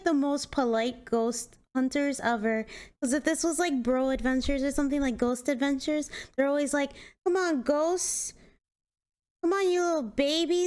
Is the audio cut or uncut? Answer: cut